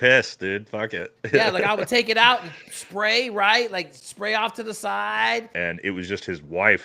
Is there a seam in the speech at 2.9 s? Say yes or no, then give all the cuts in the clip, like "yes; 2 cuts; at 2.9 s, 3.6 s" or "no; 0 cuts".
no; 1 cut; at 5.5 s